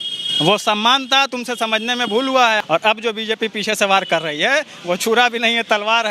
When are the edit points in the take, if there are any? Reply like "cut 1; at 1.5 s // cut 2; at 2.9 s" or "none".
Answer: cut 1; at 2.6 s